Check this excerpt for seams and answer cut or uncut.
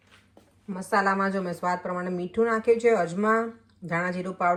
uncut